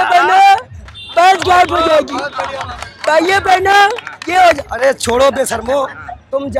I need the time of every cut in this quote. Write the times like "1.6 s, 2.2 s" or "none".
none